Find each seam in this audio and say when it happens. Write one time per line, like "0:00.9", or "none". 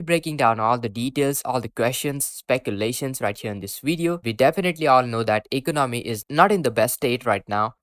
0:04.2